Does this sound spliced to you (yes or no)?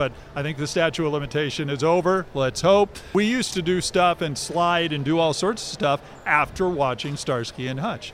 yes